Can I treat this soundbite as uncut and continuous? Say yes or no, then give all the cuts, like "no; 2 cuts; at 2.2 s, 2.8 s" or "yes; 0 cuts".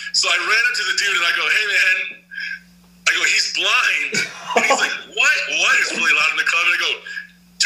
yes; 0 cuts